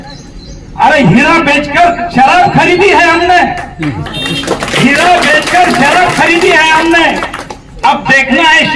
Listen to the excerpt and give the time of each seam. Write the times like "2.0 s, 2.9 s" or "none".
none